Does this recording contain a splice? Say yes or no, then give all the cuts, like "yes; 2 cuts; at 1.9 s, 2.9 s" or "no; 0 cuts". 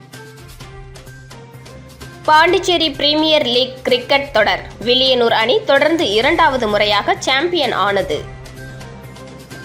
yes; 1 cut; at 1.0 s